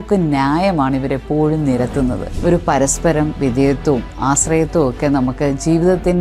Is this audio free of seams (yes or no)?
no